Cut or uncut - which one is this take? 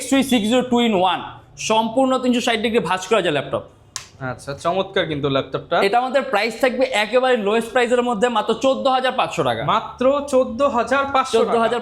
uncut